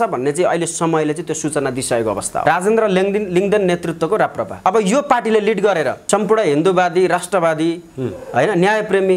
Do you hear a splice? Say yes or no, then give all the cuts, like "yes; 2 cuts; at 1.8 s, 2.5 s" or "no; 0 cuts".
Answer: yes; 3 cuts; at 2.4 s, 4.6 s, 6.0 s